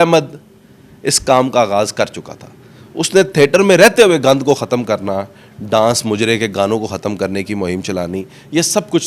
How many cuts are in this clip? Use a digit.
0